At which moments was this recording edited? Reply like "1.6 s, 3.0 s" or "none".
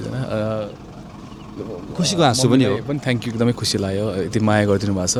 none